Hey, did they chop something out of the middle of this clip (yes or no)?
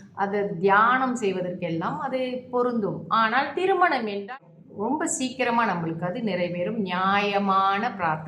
yes